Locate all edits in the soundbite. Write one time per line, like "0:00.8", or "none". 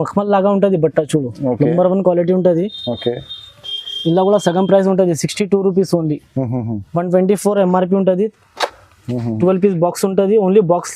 none